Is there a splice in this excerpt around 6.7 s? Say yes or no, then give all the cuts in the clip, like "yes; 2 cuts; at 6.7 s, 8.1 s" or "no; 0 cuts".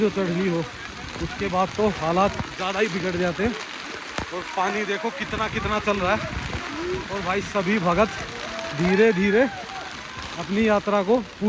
no; 0 cuts